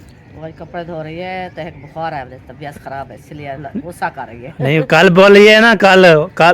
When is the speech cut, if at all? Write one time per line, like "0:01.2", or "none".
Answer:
0:03.2